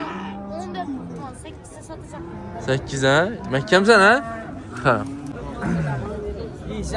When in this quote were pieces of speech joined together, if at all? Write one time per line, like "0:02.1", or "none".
0:05.3